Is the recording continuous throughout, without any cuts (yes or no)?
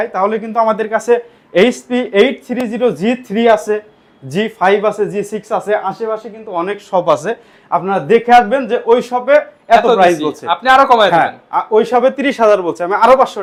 yes